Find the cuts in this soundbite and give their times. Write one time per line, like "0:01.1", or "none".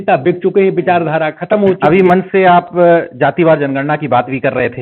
none